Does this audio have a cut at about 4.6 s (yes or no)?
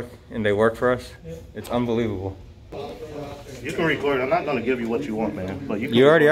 no